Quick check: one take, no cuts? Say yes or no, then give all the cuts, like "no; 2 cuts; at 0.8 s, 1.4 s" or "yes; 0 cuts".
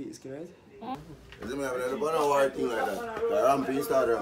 no; 1 cut; at 1.0 s